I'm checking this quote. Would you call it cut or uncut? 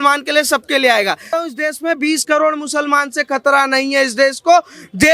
cut